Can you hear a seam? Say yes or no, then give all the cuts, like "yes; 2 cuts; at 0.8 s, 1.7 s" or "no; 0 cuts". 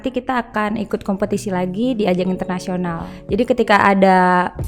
yes; 1 cut; at 3.1 s